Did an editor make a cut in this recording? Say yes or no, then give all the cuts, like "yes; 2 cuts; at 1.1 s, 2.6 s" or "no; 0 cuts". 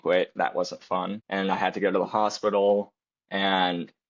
yes; 1 cut; at 1.2 s